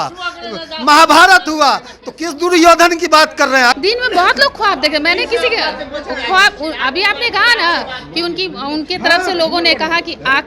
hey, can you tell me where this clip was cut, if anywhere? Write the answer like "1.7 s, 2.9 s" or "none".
3.8 s